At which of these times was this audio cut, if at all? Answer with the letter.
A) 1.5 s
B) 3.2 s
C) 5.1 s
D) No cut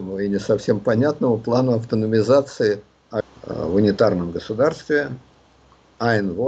B